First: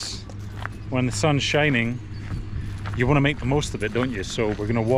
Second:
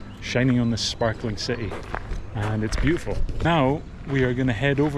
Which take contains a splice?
second; 1 cut; at 3.5 s

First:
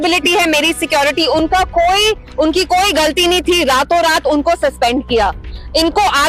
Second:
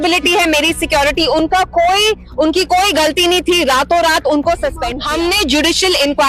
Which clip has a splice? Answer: second; 1 cut; at 4.9 s

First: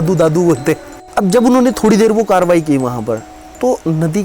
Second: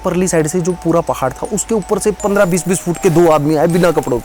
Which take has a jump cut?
first; 1 cut; at 0.9 s

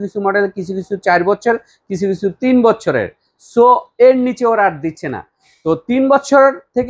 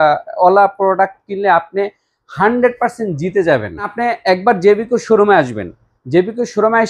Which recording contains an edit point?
second; 1 cut; at 3.9 s

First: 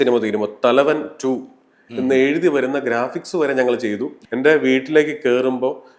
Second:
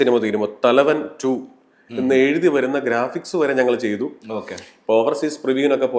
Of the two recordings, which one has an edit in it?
first; 1 cut; at 4.2 s

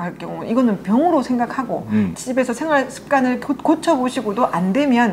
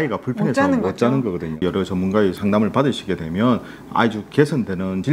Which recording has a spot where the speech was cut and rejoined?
second; 1 cut; at 1.6 s

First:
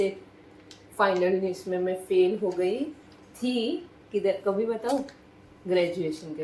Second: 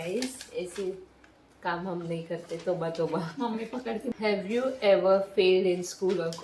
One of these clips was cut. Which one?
second; 1 cut; at 4.1 s

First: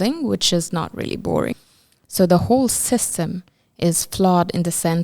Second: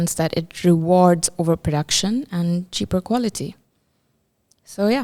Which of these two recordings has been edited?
first; 1 cut; at 1.5 s

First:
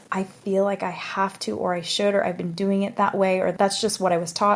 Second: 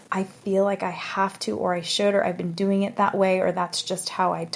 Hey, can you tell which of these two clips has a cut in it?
first; 1 cut; at 3.5 s

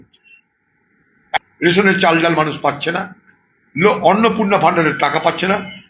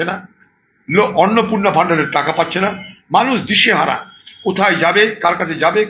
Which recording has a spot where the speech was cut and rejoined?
first; 1 cut; at 1.4 s

